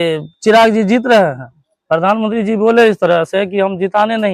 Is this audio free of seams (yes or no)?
yes